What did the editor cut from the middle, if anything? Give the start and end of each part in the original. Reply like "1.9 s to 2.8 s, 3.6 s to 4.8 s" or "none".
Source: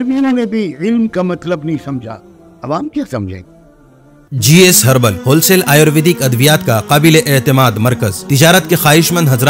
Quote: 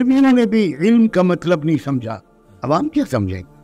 none